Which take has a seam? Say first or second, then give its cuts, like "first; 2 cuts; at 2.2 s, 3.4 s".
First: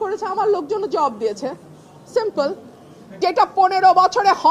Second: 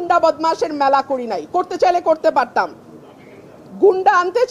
first; 1 cut; at 3.2 s